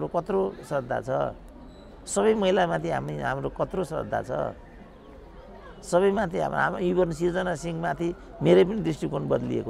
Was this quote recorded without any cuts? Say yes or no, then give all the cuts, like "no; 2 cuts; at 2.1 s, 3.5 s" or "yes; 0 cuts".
yes; 0 cuts